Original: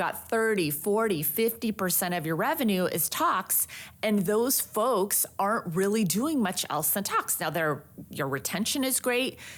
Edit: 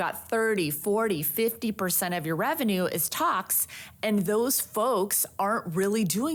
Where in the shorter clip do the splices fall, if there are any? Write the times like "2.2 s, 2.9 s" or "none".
none